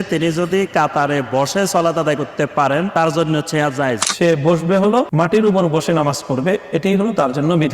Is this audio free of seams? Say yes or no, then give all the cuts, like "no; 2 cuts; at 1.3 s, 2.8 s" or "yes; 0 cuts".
no; 3 cuts; at 2.9 s, 4.1 s, 5.1 s